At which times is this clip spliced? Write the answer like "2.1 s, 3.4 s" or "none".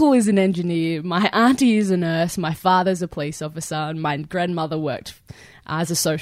none